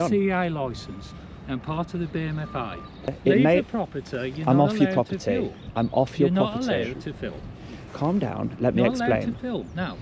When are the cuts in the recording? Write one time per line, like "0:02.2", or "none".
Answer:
0:03.2